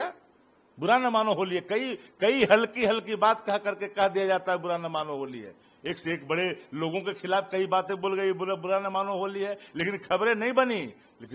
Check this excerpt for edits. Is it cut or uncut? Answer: uncut